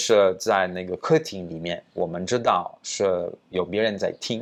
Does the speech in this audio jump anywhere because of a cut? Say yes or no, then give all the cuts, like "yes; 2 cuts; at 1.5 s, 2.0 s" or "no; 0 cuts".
no; 0 cuts